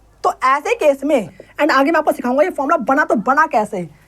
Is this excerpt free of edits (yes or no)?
no